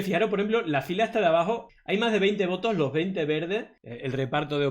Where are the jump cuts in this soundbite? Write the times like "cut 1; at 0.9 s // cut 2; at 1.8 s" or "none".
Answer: cut 1; at 1.7 s // cut 2; at 3.8 s